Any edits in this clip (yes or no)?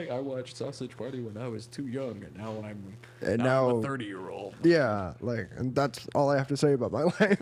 no